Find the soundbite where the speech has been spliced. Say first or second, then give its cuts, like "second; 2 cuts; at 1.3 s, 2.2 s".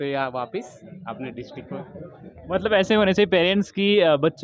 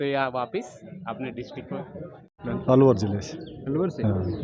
second; 1 cut; at 2.3 s